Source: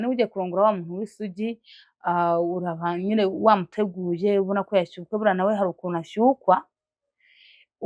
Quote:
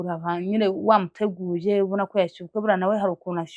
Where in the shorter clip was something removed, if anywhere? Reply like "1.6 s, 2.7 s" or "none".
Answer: none

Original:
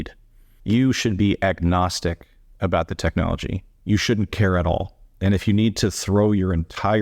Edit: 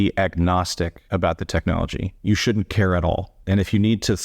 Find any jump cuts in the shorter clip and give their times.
1.0 s, 2.1 s, 3.3 s

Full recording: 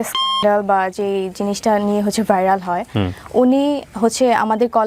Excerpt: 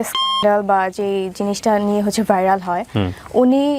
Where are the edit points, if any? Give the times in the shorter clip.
none

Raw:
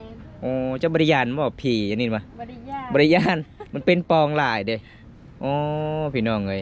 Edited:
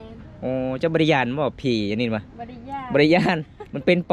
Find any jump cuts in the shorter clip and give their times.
none

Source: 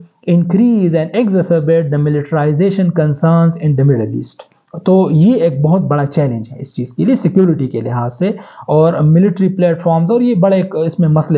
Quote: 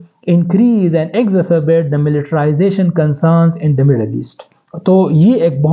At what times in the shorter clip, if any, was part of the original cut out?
none

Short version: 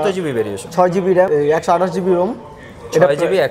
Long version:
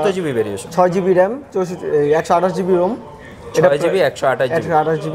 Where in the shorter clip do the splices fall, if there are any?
1.3 s

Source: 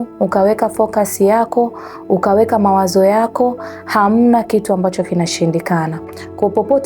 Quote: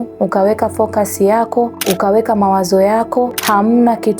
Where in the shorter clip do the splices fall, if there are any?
1.8 s, 3.4 s

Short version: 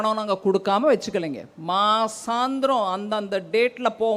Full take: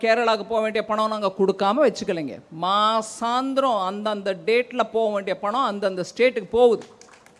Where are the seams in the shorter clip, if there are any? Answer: none

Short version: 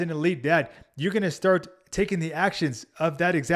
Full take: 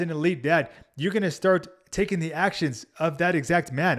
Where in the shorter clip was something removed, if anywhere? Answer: none

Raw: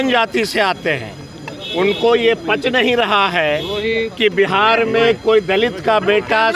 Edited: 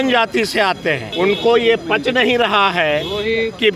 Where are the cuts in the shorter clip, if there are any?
1.1 s

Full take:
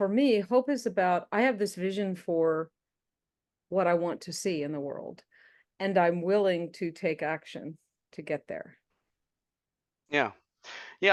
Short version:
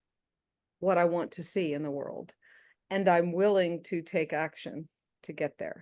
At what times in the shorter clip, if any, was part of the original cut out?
none

